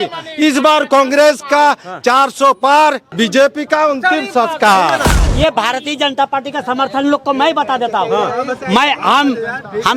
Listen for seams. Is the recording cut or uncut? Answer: cut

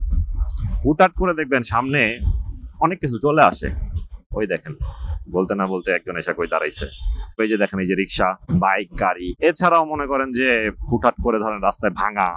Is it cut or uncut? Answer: cut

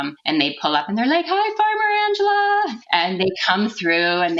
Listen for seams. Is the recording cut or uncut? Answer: cut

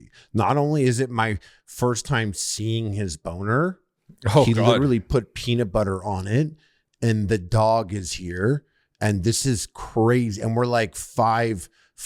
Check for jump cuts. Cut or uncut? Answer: uncut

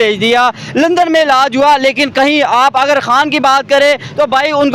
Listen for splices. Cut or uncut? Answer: uncut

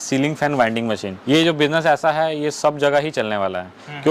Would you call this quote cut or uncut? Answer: cut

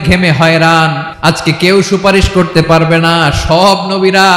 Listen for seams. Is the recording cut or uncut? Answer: cut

